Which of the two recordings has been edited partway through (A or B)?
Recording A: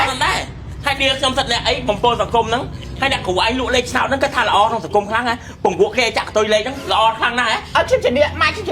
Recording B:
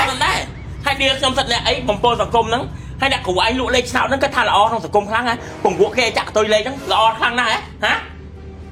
A